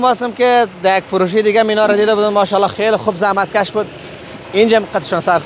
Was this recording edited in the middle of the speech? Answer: no; 0 cuts

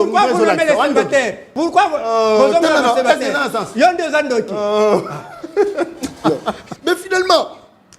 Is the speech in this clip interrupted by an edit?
yes; 2 cuts; at 1.4 s, 6.7 s

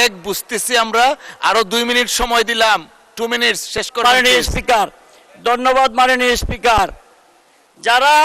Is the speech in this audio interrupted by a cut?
no; 0 cuts

